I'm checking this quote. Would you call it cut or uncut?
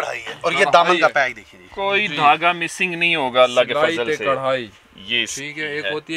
uncut